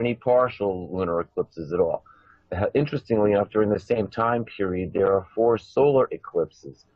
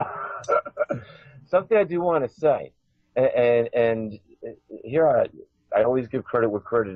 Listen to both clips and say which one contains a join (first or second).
first